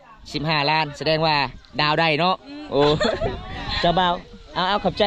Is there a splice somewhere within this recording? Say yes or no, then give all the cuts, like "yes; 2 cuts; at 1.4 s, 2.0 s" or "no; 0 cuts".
no; 0 cuts